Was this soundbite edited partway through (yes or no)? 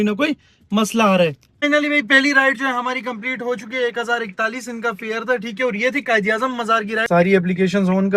yes